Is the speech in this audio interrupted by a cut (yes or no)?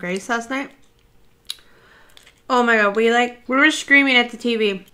yes